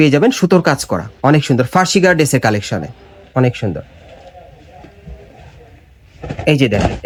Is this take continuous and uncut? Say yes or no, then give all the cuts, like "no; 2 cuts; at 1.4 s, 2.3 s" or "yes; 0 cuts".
yes; 0 cuts